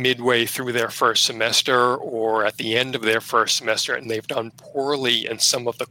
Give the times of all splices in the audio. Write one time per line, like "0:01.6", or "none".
none